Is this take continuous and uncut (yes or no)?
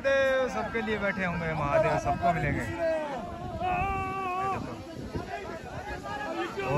yes